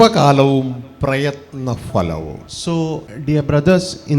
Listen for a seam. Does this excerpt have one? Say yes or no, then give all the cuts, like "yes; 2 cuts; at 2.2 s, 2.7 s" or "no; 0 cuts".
yes; 2 cuts; at 2.5 s, 3.1 s